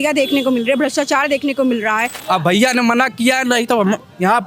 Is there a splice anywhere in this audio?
yes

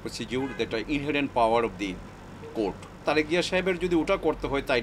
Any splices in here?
yes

